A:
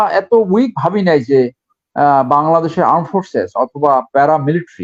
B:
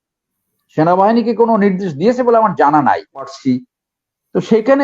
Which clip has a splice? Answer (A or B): B